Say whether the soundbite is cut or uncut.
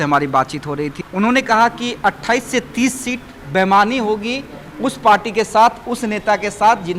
cut